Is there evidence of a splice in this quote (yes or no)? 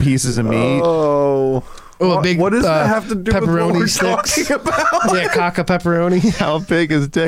no